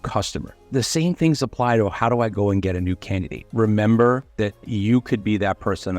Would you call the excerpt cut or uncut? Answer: cut